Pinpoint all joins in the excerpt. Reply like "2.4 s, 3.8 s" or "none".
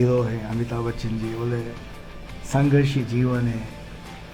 none